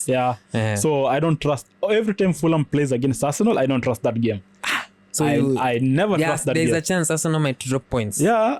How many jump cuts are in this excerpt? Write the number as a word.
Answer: zero